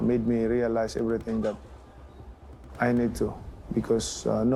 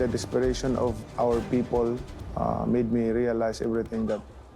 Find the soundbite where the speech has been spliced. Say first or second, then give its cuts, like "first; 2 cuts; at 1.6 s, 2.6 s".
second; 1 cut; at 1.0 s